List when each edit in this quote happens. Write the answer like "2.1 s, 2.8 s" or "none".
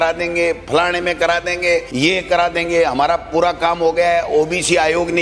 1.9 s

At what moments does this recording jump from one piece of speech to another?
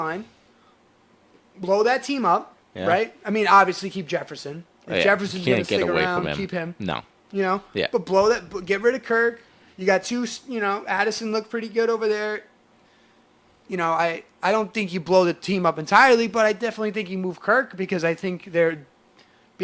none

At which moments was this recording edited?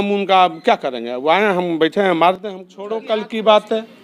2.4 s

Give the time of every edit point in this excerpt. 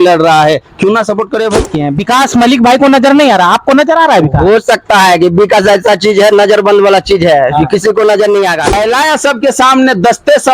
1.7 s, 8.7 s

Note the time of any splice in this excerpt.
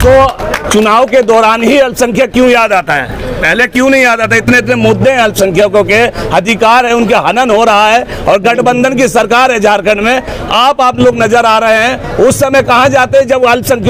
none

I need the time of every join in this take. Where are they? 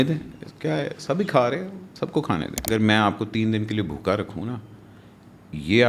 2.6 s

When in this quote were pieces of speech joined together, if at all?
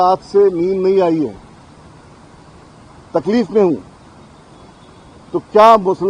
none

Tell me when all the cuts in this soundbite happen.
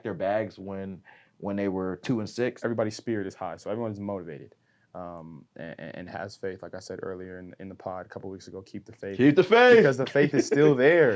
2.6 s

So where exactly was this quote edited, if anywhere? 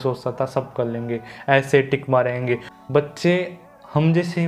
2.7 s

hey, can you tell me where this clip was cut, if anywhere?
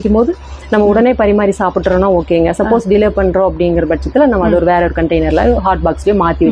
none

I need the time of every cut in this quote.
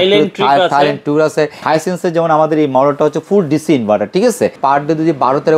1.6 s, 4.6 s

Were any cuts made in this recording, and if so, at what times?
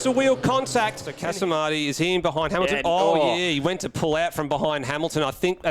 1.1 s

